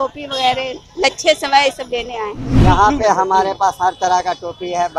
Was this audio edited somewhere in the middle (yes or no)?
yes